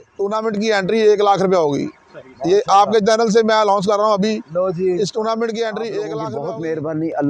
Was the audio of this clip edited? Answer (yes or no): yes